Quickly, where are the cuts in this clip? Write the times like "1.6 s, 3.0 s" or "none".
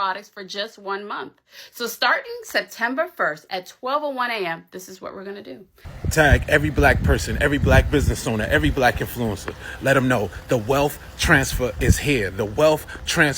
5.8 s

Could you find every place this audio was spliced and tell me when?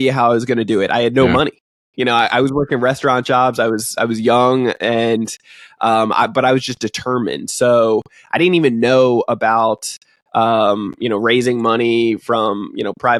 none

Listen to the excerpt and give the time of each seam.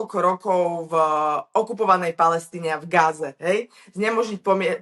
none

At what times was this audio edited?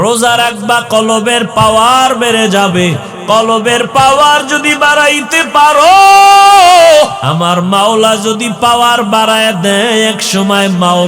7.2 s

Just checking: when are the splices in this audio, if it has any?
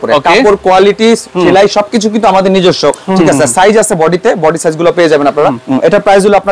3.2 s, 5.6 s

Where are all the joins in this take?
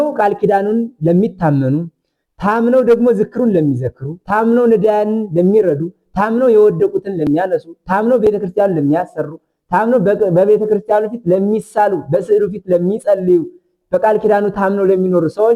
none

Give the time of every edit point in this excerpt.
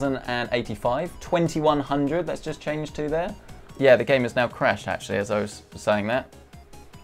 none

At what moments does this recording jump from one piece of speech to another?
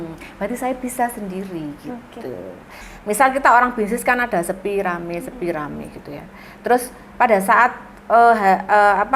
2.7 s

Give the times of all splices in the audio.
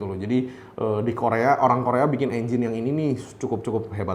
none

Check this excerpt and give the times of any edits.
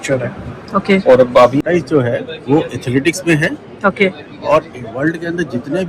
1.6 s

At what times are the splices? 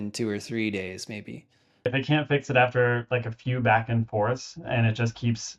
1.9 s

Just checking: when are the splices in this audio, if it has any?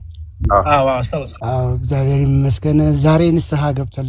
1.3 s

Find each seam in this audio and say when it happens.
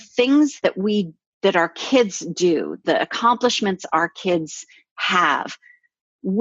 0.9 s, 2.8 s

